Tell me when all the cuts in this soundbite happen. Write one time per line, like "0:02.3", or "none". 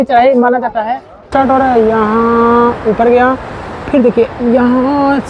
0:01.3

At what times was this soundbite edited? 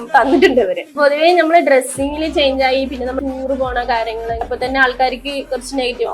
0:01.0
0:03.2
0:04.5

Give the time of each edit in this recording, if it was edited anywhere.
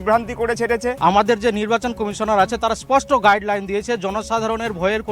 0:01.0

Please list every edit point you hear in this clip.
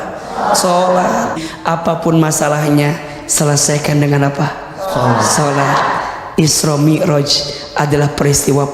0:01.4

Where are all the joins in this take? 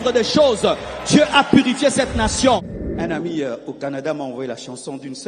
0:02.7

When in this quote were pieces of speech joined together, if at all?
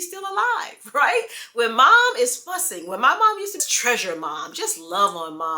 0:03.6

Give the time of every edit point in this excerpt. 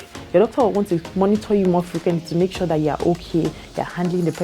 0:01.1

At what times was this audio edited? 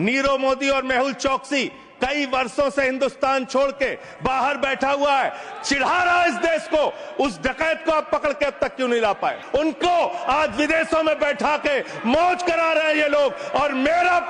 0:09.4

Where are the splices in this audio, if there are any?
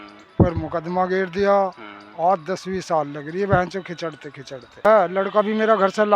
0:04.8

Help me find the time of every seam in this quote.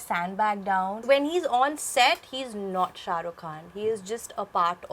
0:01.0

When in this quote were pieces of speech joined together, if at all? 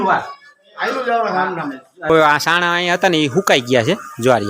0:02.1

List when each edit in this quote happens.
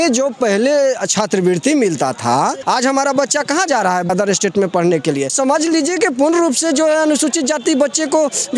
0:02.6
0:04.1
0:05.3

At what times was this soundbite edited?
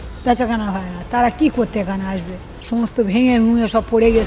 0:02.3

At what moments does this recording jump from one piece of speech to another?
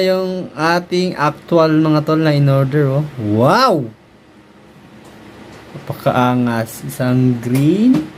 none

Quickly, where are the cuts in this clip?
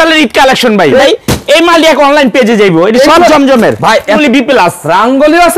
0:01.0
0:04.2

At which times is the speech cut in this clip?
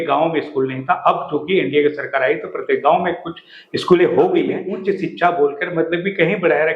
0:04.7

